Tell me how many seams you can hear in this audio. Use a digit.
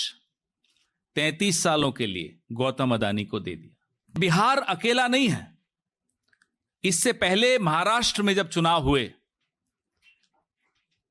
1